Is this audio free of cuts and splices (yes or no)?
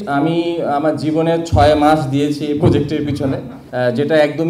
no